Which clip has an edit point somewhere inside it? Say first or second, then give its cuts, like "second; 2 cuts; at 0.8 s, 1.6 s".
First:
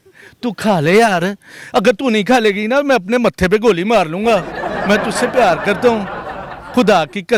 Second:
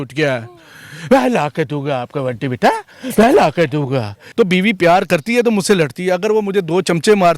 second; 1 cut; at 4.2 s